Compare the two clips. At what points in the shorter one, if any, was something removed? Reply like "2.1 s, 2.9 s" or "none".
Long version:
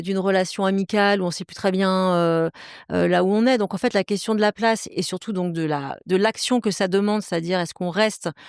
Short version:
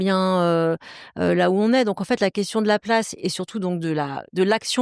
none

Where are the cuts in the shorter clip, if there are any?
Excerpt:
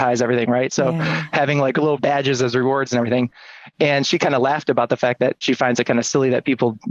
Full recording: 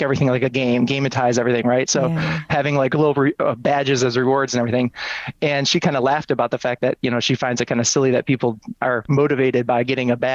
2.0 s, 5.4 s

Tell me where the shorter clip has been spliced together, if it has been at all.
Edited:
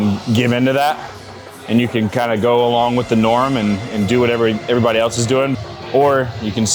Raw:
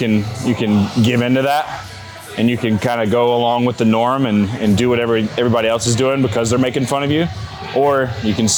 5.6 s

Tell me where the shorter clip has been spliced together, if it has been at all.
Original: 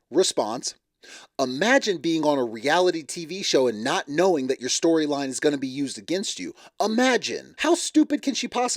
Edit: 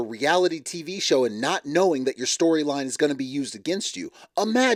none

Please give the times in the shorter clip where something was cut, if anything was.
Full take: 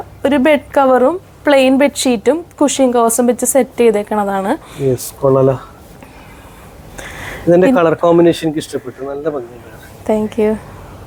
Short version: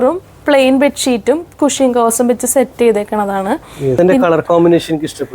4.0 s

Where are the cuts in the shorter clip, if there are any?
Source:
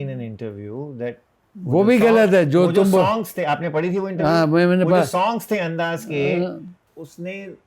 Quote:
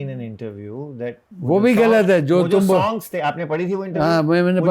1.3 s

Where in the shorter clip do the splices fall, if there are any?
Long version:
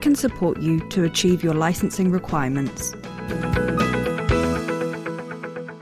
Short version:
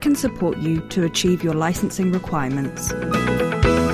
2.9 s

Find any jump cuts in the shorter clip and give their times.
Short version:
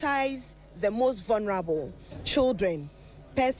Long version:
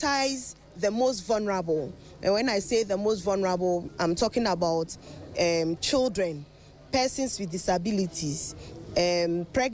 2.2 s

